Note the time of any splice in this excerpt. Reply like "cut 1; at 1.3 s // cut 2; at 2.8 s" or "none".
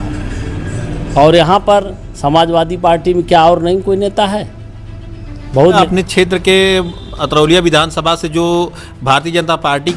cut 1; at 5.8 s